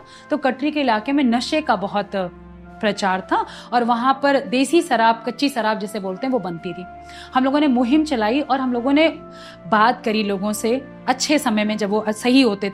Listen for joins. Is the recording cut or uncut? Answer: uncut